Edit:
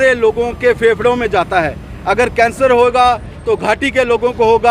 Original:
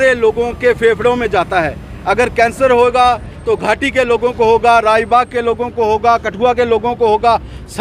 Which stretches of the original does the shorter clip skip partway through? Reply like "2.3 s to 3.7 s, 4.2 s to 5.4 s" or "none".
none